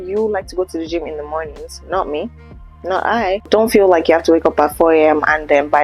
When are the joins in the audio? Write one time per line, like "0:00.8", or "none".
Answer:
0:03.5